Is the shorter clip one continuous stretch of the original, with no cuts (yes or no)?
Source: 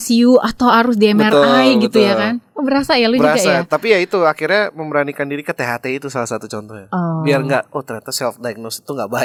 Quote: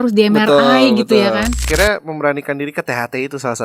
no